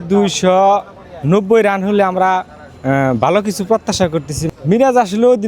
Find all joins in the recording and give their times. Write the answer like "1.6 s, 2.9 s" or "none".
4.4 s